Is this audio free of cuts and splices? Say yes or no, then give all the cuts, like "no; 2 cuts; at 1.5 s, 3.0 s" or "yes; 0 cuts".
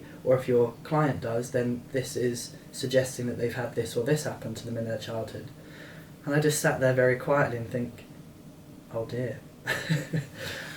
yes; 0 cuts